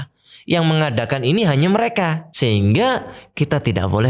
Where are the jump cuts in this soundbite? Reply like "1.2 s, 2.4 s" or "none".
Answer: 2.3 s